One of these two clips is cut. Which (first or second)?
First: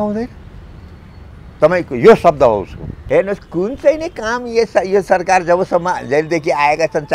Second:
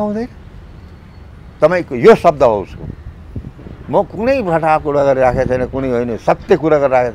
first